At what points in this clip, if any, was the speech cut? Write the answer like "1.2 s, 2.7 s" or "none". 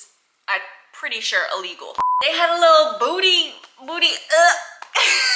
2.0 s

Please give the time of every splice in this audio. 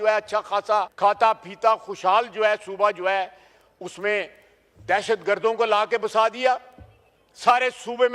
0.9 s

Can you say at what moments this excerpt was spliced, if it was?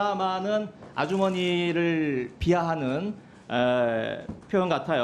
none

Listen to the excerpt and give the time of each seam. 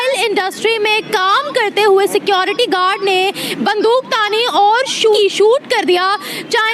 5.2 s

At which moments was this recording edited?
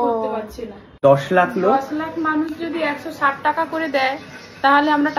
1.0 s

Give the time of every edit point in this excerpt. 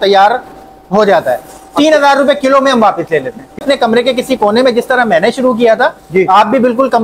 3.6 s

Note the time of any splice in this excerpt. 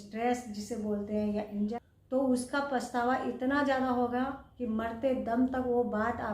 1.7 s

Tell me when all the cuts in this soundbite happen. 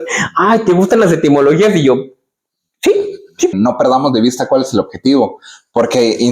3.5 s

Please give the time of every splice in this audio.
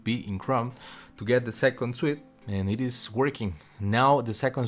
2.3 s

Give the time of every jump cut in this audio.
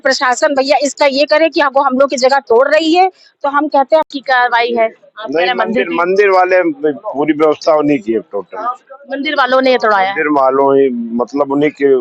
4.1 s

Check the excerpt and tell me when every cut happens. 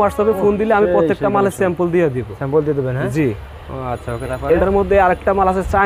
none

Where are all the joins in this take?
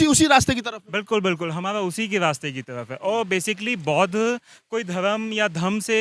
none

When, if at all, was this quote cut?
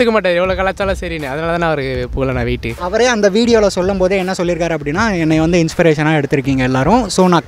2.7 s

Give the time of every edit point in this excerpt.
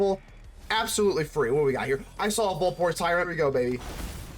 3.3 s

